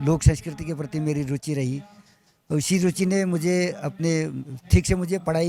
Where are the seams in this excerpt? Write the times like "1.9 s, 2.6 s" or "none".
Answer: none